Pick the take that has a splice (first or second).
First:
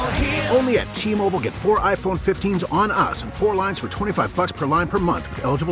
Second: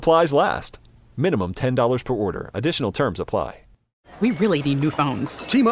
second